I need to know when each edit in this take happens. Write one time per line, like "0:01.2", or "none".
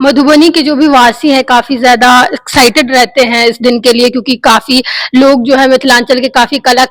none